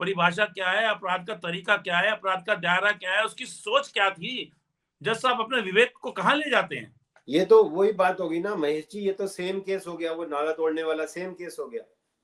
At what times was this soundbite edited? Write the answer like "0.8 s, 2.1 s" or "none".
none